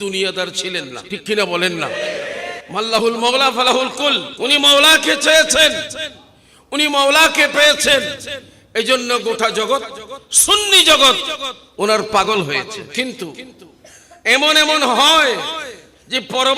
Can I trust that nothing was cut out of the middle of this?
no; 4 cuts; at 1.0 s, 2.5 s, 4.3 s, 12.9 s

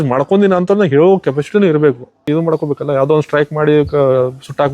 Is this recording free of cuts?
no; 1 cut; at 2.2 s

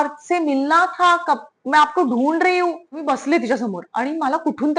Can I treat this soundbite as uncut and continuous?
no; 1 cut; at 2.9 s

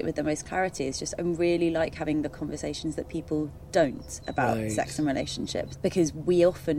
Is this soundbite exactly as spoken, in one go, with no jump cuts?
no; 1 cut; at 5.6 s

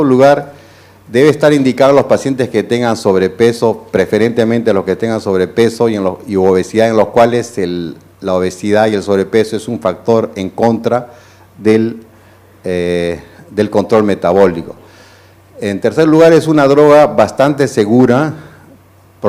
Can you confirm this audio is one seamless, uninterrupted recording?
yes; 0 cuts

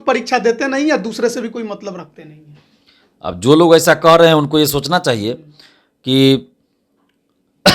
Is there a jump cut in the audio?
no; 0 cuts

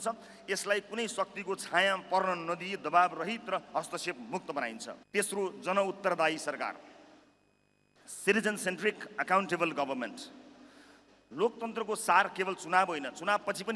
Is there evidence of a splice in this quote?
no; 0 cuts

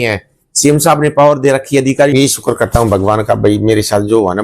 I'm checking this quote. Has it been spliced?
yes; 1 cut; at 2.1 s

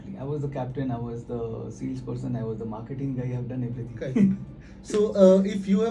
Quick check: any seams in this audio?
no; 0 cuts

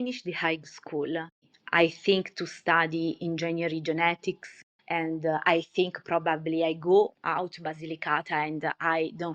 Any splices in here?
yes; 3 cuts; at 1.5 s, 4.6 s, 7.2 s

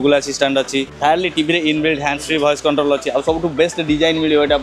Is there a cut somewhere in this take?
yes; 1 cut; at 0.9 s

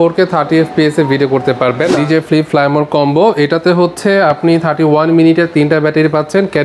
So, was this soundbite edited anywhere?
yes; 1 cut; at 2.0 s

